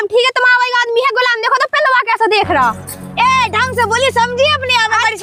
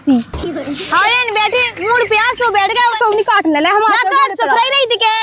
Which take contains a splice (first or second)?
second